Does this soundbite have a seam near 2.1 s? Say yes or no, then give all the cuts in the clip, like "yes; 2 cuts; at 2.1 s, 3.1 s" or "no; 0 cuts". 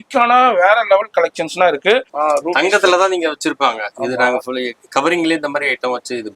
yes; 1 cut; at 2.1 s